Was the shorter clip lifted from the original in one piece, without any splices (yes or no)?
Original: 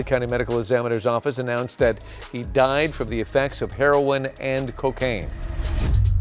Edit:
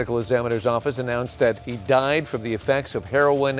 no